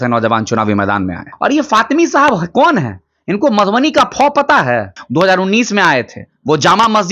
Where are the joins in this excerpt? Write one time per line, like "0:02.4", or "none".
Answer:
0:01.3
0:05.0